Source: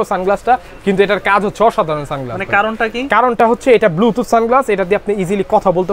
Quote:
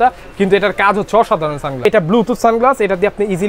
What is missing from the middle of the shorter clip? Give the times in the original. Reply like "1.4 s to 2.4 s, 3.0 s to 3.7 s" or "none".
2.3 s to 3.7 s